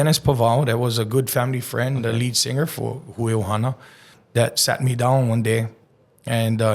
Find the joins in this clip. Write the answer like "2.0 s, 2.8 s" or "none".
4.2 s